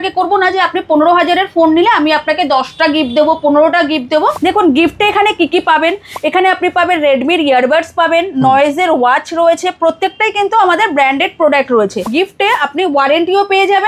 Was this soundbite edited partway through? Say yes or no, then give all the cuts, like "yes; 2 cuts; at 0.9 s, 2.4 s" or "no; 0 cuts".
yes; 2 cuts; at 4.3 s, 12.1 s